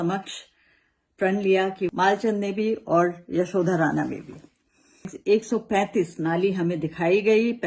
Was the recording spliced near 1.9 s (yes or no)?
yes